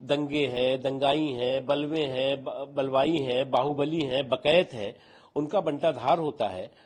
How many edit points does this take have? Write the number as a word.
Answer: zero